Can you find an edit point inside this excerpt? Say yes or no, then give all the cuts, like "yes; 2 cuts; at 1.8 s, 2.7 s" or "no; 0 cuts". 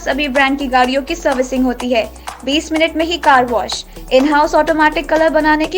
no; 0 cuts